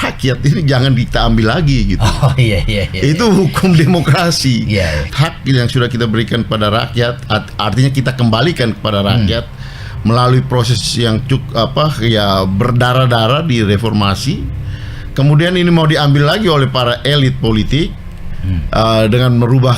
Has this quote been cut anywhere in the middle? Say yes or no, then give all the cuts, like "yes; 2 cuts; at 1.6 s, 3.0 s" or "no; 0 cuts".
yes; 1 cut; at 5.1 s